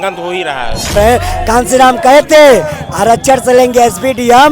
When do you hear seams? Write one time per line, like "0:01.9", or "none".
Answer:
0:01.0